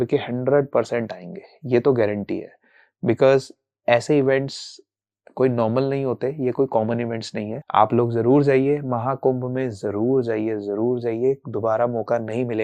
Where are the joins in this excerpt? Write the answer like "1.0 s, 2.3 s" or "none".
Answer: none